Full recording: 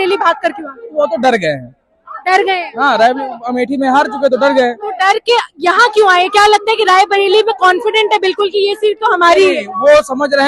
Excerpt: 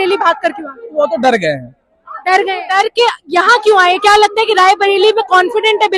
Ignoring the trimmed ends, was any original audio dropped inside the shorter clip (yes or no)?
yes